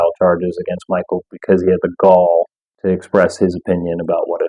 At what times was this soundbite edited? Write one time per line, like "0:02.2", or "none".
0:02.6